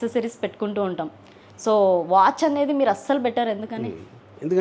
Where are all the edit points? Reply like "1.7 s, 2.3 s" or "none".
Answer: none